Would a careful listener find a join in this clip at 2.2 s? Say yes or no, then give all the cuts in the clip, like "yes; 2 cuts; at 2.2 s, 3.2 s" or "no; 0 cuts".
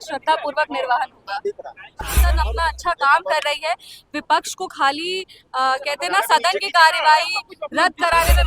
yes; 1 cut; at 2.2 s